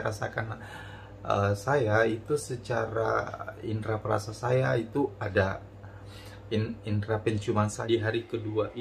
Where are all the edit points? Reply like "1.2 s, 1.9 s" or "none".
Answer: 7.7 s